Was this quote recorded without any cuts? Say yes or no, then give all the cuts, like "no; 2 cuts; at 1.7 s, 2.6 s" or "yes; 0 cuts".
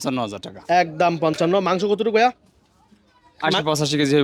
yes; 0 cuts